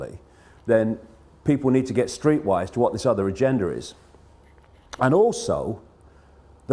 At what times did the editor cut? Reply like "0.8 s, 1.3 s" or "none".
5.8 s